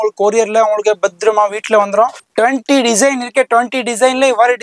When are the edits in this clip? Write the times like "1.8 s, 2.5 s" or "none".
2.2 s